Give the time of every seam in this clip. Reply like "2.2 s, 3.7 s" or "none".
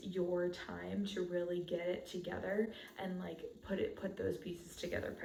none

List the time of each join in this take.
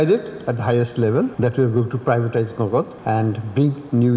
1.3 s, 3.0 s

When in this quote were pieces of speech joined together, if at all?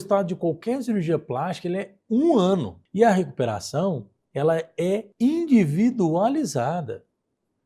2.8 s, 5.1 s

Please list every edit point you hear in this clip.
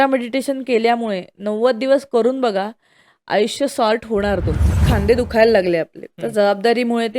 4.8 s

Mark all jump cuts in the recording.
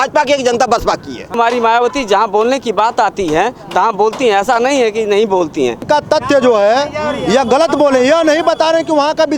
1.4 s, 5.8 s

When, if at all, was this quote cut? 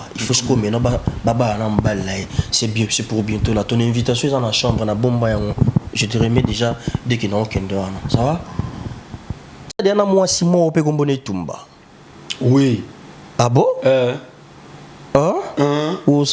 9.8 s

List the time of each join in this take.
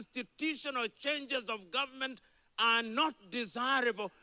none

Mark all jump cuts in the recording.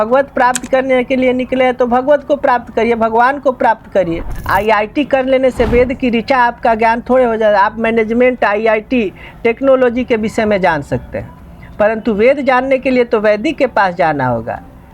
4.3 s

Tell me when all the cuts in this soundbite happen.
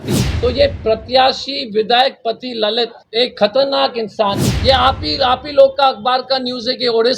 4.5 s

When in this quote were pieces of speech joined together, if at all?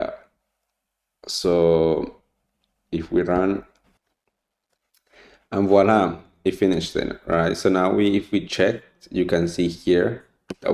3.7 s

